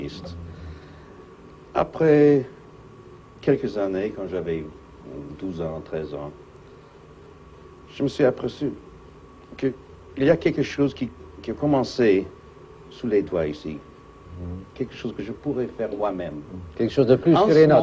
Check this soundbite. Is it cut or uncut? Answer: uncut